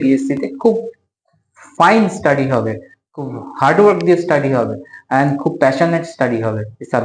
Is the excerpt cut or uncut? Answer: uncut